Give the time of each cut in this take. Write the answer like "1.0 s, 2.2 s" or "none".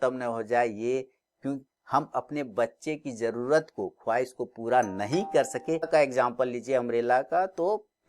5.9 s